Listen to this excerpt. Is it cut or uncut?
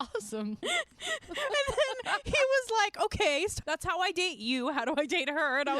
cut